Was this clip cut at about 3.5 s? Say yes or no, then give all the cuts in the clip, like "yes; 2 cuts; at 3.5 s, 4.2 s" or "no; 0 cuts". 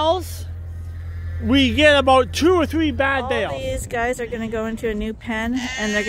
yes; 1 cut; at 3.5 s